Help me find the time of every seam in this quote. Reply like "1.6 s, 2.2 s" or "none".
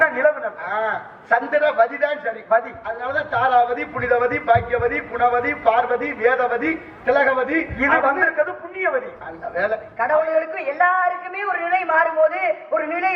9.9 s